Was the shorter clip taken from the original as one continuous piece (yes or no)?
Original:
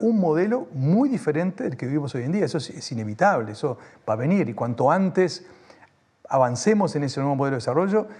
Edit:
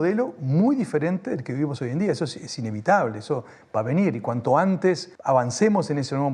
no